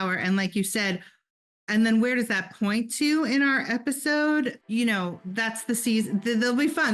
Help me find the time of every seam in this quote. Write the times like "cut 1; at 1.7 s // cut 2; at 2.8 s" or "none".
cut 1; at 4.6 s